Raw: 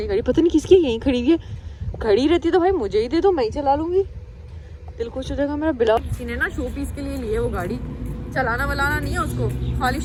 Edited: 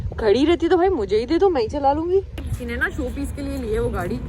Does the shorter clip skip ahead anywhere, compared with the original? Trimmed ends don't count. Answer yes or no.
yes